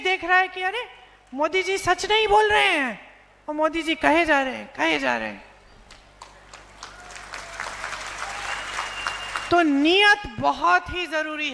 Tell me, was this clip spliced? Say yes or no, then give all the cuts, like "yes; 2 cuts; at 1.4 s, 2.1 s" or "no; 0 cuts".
no; 0 cuts